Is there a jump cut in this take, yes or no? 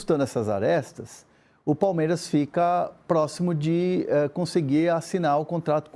no